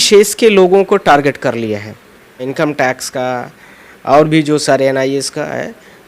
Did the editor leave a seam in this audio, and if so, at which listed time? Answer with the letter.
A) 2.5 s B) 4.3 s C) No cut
A